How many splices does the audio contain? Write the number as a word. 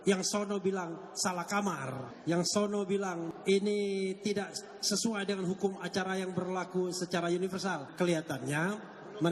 three